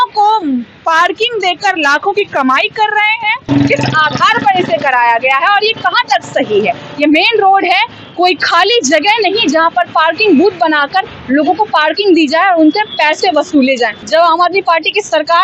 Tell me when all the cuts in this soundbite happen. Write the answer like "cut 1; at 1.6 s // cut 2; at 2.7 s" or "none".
cut 1; at 3.4 s // cut 2; at 14.0 s